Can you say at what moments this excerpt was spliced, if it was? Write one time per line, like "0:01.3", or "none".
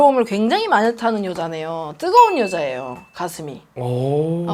none

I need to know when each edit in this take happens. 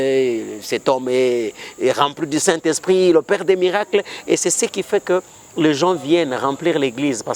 none

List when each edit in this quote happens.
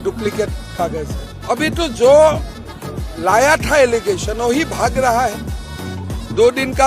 0:01.3

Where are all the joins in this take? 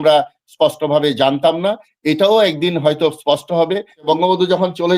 0:04.1

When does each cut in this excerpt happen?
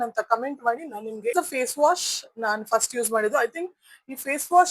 0:01.3

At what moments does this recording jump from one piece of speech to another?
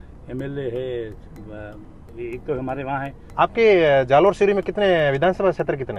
0:03.2

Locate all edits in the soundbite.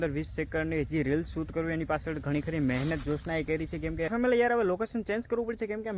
0:04.1

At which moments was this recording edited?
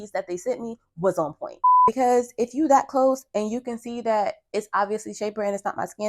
0:01.8

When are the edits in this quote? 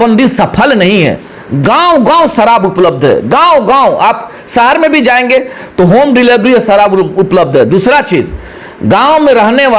none

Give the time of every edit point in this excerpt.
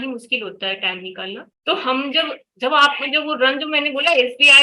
none

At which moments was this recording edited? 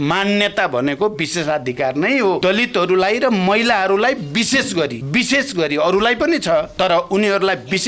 0:02.4
0:05.0
0:06.7

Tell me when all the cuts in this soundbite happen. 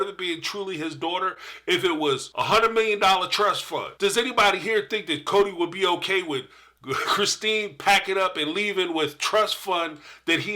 0:02.3
0:03.9

